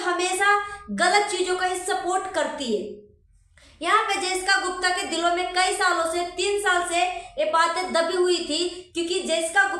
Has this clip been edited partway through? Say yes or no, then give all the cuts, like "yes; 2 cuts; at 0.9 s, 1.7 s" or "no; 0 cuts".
no; 0 cuts